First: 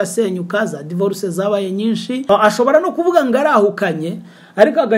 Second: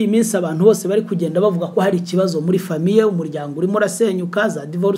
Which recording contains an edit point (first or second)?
first